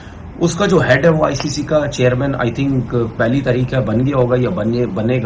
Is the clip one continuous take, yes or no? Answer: yes